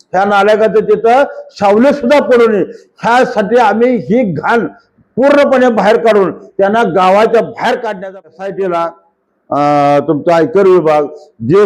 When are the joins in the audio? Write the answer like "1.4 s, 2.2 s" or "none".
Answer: 8.0 s